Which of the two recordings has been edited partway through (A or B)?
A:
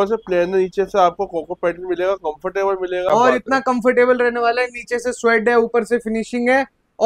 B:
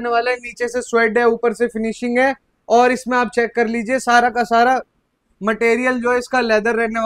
A